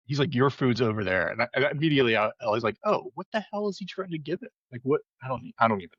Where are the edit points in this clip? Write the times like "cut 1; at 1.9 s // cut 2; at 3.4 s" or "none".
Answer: none